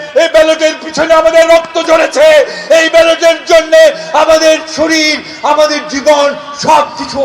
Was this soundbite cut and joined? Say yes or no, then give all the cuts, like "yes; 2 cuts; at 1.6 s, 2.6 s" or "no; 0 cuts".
no; 0 cuts